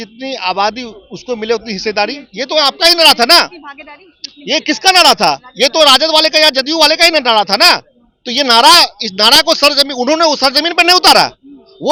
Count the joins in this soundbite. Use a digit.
0